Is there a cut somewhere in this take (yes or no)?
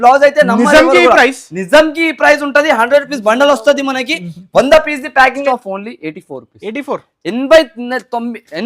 yes